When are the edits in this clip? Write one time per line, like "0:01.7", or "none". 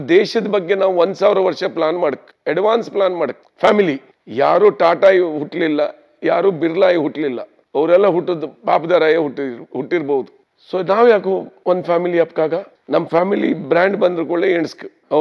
none

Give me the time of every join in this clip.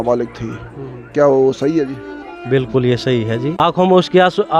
0:03.5

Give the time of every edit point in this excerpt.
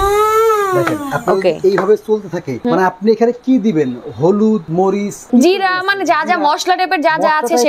0:02.6
0:05.0

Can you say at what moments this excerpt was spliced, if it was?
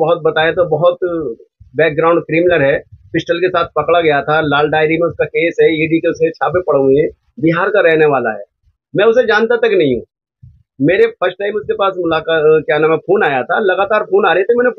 none

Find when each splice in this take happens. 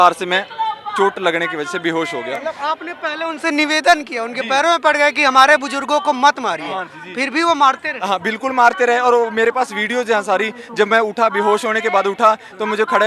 none

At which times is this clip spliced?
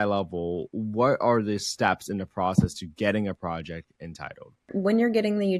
0:04.7

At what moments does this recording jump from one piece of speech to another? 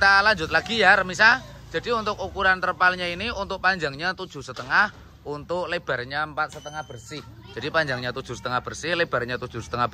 none

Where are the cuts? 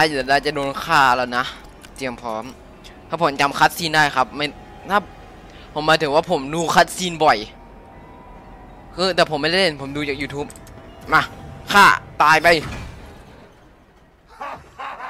none

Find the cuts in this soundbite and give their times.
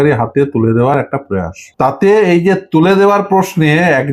0:01.6

